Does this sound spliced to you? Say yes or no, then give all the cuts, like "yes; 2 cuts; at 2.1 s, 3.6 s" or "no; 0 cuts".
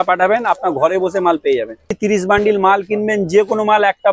yes; 1 cut; at 2.0 s